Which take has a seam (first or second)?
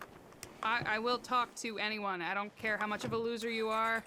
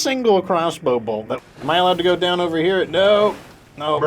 second